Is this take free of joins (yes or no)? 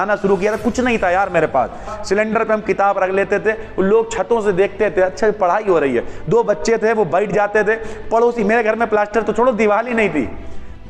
no